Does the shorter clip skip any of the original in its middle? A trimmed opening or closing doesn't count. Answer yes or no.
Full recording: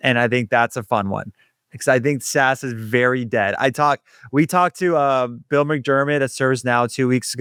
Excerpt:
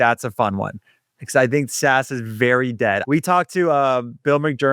yes